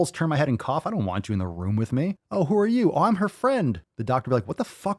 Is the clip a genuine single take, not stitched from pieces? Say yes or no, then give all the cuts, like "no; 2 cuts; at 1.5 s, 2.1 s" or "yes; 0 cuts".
no; 2 cuts; at 2.2 s, 3.9 s